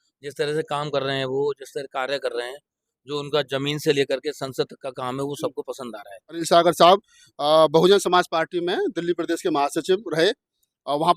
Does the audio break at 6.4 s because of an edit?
yes; 1 cut; at 6.4 s

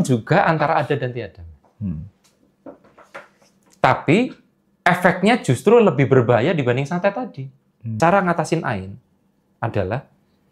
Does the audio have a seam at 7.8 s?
yes; 1 cut; at 7.8 s

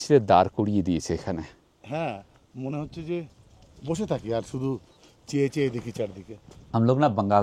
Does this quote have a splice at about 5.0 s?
no; 1 cut; at 6.5 s

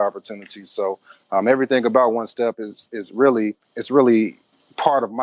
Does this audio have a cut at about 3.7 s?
yes; 1 cut; at 3.7 s

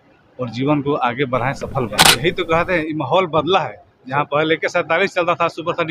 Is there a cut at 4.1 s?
no; 1 cut; at 2.1 s

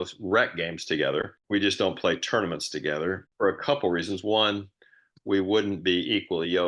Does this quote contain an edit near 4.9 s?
no; 2 cuts; at 1.4 s, 3.3 s

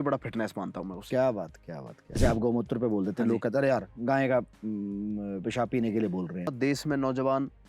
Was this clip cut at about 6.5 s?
yes; 2 cuts; at 2.2 s, 6.5 s

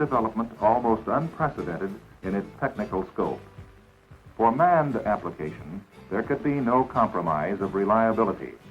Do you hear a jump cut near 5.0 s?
yes; 1 cut; at 5.0 s

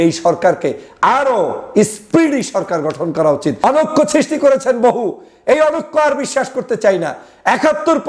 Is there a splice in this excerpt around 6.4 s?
no; 1 cut; at 3.6 s

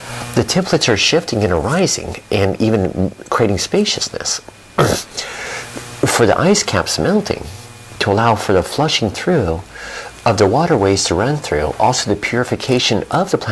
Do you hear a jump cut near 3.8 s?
no; 1 cut; at 1.0 s

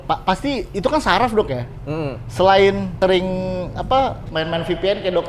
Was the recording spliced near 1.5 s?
no; 1 cut; at 2.9 s

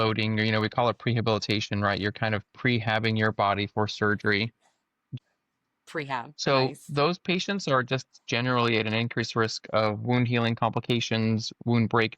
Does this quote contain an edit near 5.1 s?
yes; 1 cut; at 5.1 s

